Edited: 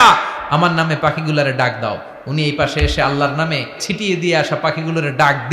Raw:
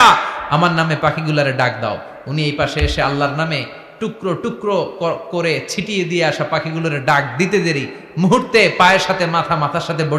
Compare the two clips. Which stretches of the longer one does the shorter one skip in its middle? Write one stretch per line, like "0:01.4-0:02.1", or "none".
0:03.8-0:05.7